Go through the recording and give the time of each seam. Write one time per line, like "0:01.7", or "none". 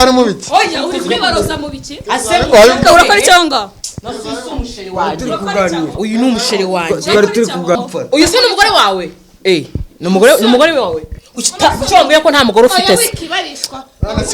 0:07.8